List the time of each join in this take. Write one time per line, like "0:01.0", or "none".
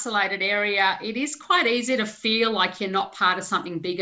none